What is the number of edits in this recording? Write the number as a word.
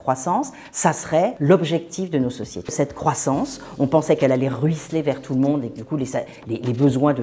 two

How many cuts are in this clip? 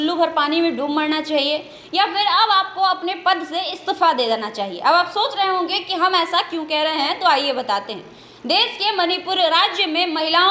zero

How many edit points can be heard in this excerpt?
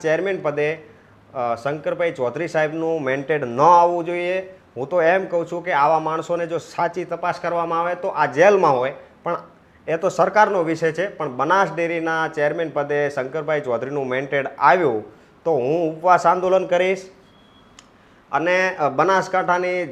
zero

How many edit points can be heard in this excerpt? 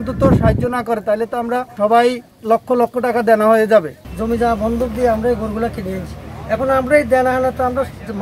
three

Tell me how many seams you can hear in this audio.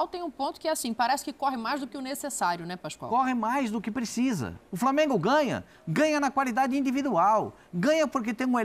one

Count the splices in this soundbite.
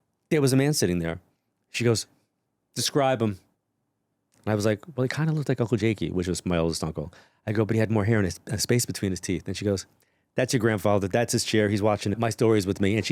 one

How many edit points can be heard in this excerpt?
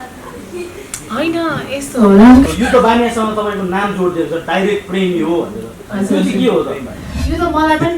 one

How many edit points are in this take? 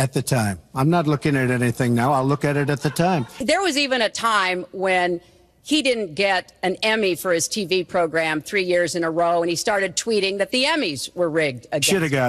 one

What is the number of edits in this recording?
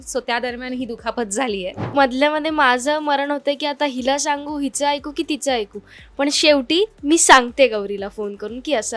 one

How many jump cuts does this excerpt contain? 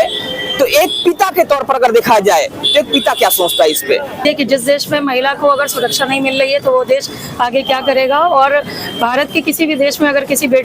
one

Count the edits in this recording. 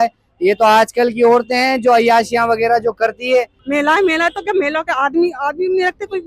one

